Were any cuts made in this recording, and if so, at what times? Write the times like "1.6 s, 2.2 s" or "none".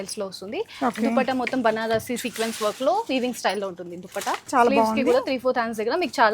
4.5 s

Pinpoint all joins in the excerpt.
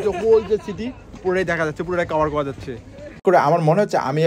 3.2 s

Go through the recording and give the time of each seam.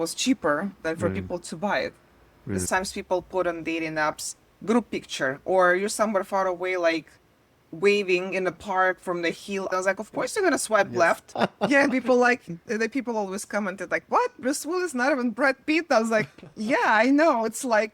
2.7 s, 9.7 s, 11.3 s

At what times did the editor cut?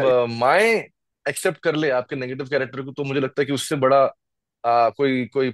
none

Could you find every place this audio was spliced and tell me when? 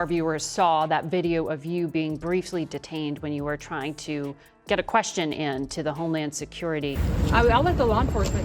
7.0 s

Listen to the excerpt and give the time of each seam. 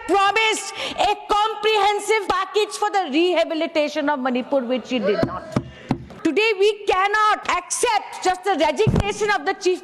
2.2 s, 6.1 s, 7.4 s

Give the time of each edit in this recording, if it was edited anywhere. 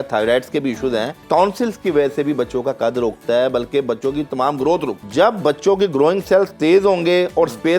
1.2 s, 5.0 s

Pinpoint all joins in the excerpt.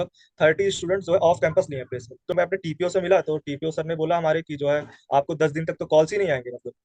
2.2 s

